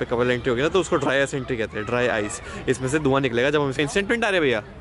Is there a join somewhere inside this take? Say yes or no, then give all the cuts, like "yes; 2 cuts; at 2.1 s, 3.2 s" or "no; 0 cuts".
yes; 1 cut; at 3.7 s